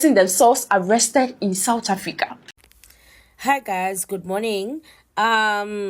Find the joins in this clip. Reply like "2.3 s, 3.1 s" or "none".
2.4 s